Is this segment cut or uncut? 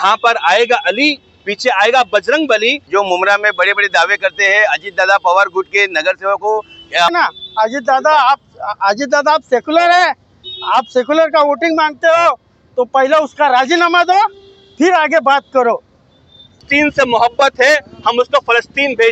cut